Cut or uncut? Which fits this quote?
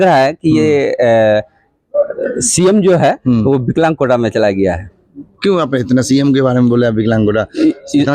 uncut